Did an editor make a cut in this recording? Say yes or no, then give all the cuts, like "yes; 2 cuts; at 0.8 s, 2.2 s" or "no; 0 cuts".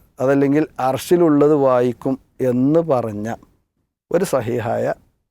no; 0 cuts